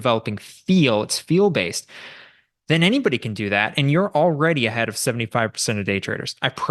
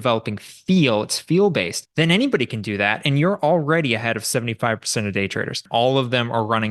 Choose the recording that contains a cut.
second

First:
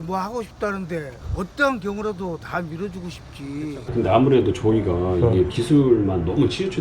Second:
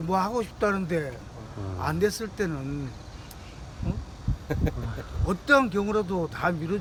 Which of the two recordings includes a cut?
first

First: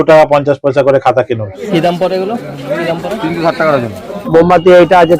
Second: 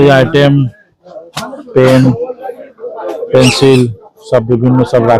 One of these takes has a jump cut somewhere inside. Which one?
first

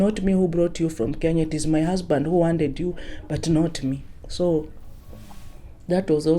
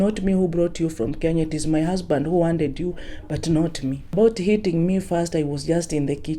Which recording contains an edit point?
second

